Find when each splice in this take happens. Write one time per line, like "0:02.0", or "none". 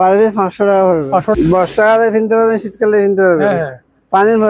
0:01.3